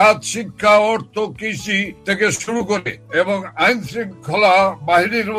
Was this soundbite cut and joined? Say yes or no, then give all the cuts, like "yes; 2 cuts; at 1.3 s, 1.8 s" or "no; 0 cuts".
no; 0 cuts